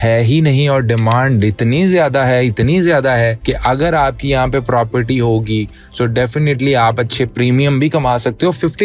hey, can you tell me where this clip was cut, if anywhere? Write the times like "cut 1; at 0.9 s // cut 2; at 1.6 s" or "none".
none